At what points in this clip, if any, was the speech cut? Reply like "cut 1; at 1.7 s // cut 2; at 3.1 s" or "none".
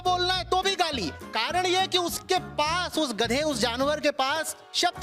none